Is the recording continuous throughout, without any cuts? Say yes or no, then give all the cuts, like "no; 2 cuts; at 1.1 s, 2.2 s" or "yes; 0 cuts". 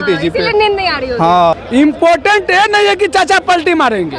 no; 1 cut; at 1.5 s